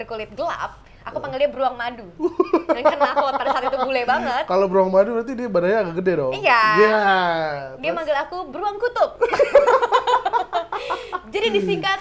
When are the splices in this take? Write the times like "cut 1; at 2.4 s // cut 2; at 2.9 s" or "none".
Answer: none